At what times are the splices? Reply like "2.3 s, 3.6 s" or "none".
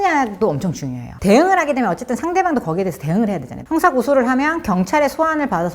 1.1 s, 3.5 s